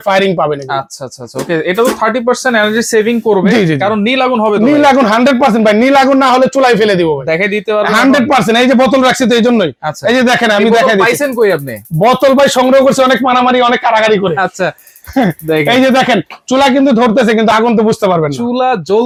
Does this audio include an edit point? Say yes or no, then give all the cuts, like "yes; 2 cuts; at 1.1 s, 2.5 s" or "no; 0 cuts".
no; 0 cuts